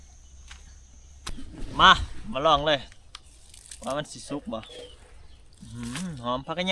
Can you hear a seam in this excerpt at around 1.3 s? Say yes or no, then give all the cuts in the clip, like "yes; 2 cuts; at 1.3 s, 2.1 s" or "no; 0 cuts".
yes; 1 cut; at 1.3 s